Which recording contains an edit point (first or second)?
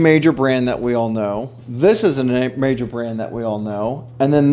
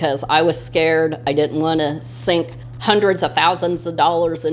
second